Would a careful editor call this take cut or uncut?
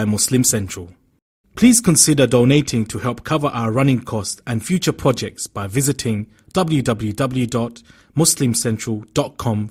uncut